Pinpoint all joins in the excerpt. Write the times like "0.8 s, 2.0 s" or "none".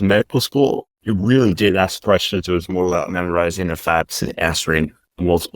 0.9 s